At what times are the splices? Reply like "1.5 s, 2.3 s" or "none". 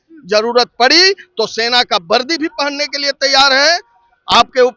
none